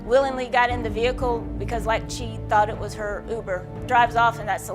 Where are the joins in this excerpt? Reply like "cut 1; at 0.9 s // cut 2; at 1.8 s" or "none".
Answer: cut 1; at 3.7 s